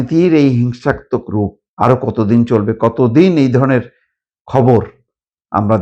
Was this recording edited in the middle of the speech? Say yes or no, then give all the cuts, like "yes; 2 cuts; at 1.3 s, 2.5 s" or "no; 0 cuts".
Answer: yes; 1 cut; at 1.6 s